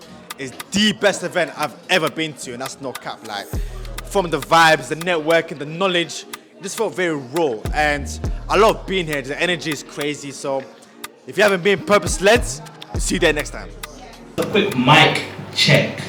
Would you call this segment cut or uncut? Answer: uncut